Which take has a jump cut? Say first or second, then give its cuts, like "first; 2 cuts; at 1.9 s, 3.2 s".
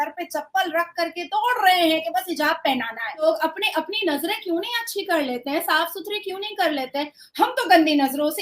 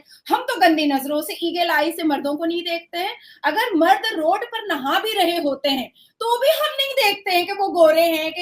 first; 1 cut; at 3.3 s